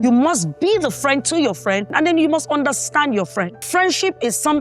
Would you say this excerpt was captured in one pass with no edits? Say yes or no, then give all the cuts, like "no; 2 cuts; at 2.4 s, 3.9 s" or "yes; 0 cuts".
no; 2 cuts; at 1.9 s, 3.6 s